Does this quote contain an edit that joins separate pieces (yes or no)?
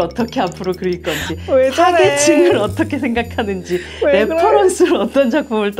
no